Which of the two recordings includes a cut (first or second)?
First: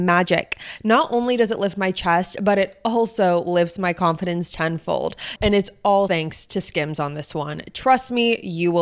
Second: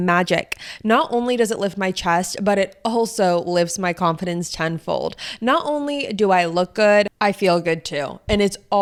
first